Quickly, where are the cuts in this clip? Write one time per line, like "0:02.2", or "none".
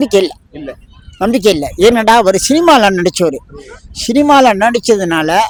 none